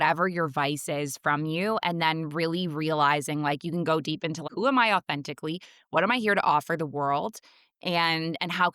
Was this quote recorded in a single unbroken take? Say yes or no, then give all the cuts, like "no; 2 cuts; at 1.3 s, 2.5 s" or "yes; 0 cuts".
no; 1 cut; at 4.4 s